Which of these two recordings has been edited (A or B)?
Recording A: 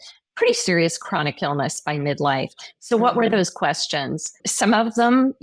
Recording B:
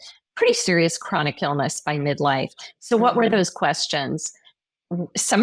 A